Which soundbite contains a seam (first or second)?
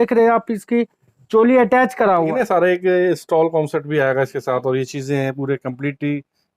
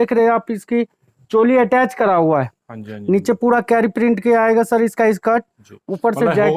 first